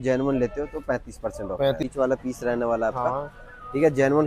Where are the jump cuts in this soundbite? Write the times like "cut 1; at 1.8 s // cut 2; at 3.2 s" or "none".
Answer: cut 1; at 1.8 s